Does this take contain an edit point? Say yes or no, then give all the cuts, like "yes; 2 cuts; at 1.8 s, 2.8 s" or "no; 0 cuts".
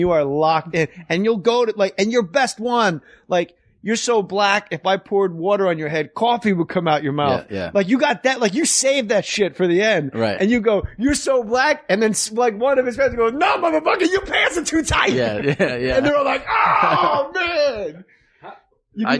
yes; 1 cut; at 1.0 s